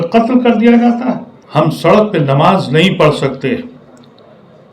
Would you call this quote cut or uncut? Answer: cut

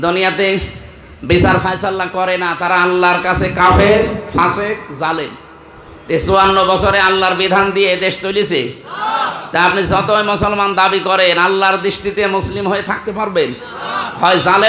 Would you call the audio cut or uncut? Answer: uncut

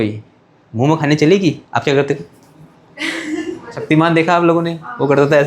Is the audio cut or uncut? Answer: cut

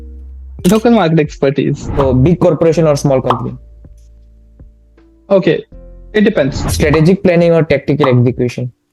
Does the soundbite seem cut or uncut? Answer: cut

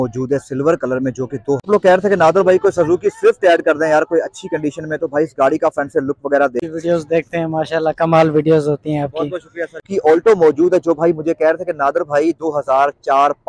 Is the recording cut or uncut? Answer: cut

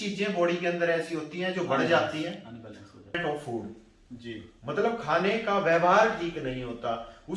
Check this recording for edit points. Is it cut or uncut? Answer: cut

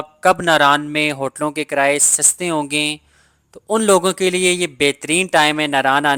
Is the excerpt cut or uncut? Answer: uncut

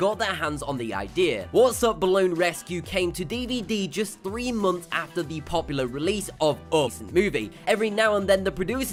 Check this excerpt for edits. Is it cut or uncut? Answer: uncut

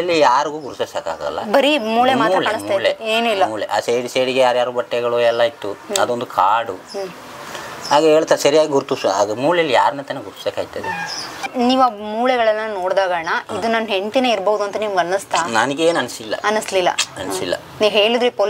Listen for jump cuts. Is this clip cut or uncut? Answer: cut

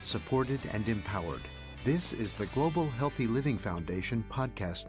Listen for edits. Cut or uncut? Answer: uncut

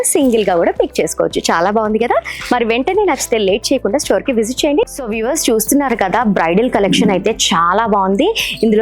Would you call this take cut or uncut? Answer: cut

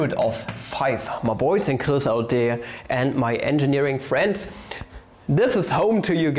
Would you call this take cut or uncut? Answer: uncut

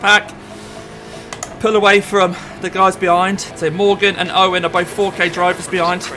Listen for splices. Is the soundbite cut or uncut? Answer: cut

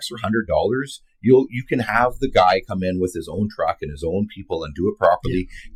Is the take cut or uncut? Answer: uncut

